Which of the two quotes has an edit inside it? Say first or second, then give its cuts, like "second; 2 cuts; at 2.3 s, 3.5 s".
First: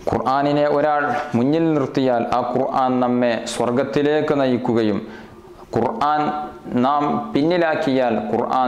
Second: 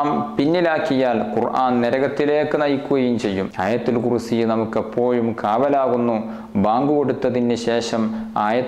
second; 1 cut; at 3.5 s